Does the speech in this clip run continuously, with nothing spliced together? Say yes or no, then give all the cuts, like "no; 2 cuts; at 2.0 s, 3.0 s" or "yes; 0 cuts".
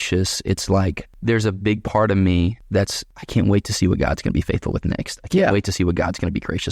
no; 2 cuts; at 1.1 s, 2.8 s